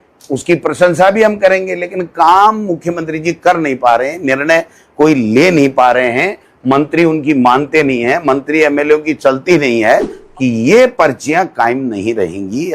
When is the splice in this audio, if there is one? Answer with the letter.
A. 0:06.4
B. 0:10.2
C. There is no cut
B